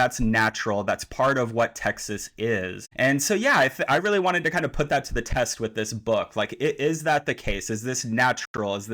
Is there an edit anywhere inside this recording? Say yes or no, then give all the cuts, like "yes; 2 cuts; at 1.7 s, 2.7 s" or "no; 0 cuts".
yes; 1 cut; at 2.8 s